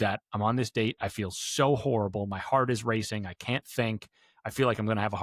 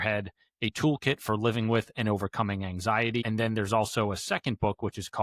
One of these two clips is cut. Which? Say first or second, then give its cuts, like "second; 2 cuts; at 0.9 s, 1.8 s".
second; 1 cut; at 3.2 s